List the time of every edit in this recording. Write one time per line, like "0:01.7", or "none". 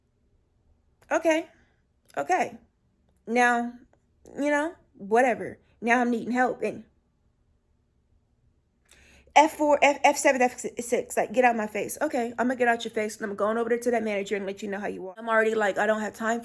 0:15.0